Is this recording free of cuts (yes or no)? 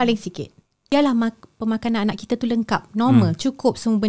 no